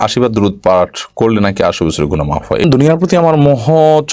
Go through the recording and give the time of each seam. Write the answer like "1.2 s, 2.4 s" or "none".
2.6 s